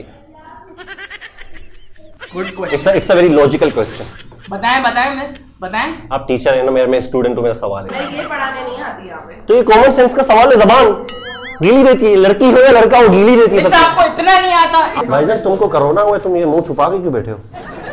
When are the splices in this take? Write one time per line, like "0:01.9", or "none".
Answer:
0:02.1
0:07.9
0:15.0